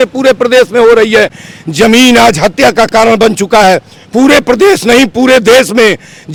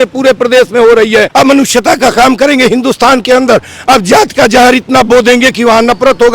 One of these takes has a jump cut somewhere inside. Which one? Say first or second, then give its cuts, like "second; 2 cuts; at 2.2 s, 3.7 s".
second; 1 cut; at 1.3 s